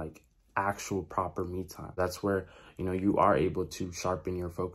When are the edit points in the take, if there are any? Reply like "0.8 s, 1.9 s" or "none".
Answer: 2.0 s